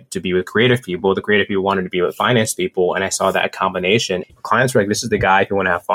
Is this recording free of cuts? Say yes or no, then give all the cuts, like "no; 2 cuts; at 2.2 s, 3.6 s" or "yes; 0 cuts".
no; 1 cut; at 4.3 s